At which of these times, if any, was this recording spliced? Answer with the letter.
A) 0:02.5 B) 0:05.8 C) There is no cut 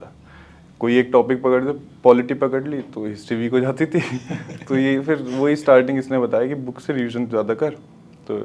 C